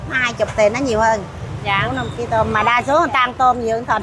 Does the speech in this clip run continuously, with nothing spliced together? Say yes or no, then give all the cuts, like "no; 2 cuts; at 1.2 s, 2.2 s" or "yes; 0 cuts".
no; 1 cut; at 1.4 s